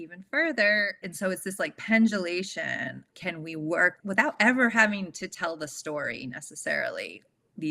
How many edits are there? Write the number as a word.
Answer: three